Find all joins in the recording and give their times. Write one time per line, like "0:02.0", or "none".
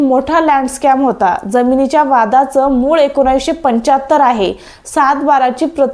none